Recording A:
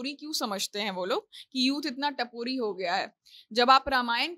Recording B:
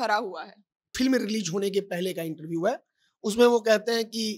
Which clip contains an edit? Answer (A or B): B